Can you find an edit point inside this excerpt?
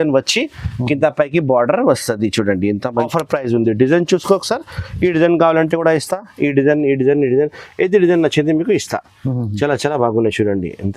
yes; 1 cut; at 3.1 s

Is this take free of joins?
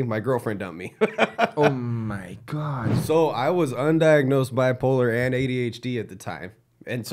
no; 1 cut; at 2.9 s

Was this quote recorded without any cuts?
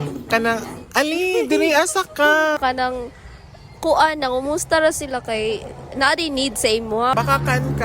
no; 2 cuts; at 2.6 s, 7.1 s

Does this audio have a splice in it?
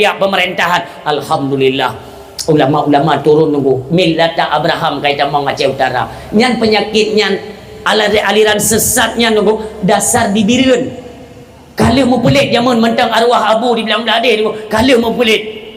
no; 0 cuts

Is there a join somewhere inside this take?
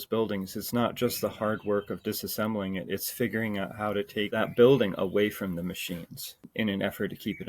yes; 2 cuts; at 4.4 s, 6.5 s

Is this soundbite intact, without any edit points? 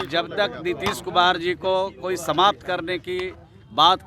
yes; 0 cuts

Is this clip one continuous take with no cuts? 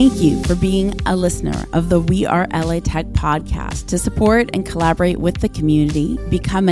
yes; 0 cuts

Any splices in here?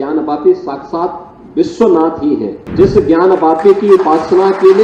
yes; 1 cut; at 2.6 s

